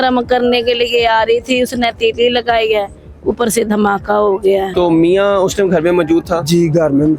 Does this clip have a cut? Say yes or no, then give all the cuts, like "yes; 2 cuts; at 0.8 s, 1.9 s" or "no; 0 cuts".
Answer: yes; 1 cut; at 4.7 s